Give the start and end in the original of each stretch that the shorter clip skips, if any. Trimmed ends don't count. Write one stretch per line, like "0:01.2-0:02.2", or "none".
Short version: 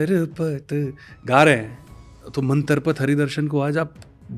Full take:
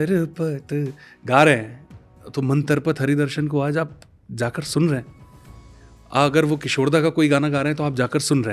none